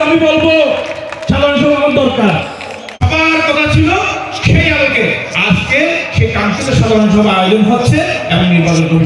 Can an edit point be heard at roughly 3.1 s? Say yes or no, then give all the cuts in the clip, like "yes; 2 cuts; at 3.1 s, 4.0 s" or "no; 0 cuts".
yes; 1 cut; at 3.1 s